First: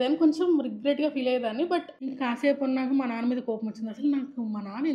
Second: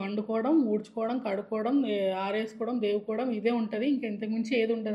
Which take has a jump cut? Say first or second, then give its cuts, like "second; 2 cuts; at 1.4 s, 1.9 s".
first; 1 cut; at 1.9 s